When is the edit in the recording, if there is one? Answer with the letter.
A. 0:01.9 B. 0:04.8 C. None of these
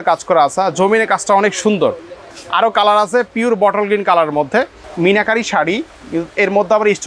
B